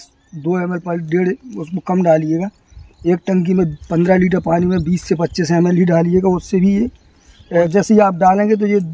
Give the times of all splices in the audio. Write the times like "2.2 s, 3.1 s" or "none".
7.7 s